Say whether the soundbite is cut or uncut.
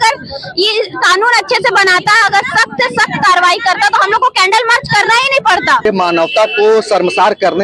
cut